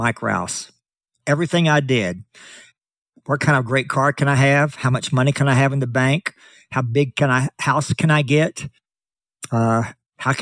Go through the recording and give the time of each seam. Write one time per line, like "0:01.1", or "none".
none